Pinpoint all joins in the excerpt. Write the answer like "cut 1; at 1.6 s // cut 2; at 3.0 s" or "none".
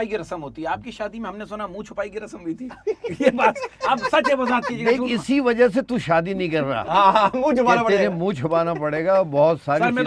none